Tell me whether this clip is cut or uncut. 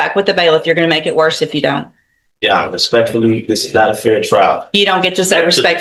uncut